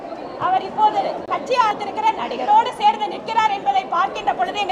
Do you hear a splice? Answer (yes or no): yes